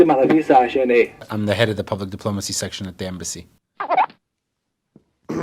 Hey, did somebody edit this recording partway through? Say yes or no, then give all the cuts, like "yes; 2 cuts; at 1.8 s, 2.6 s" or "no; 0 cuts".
yes; 1 cut; at 1.2 s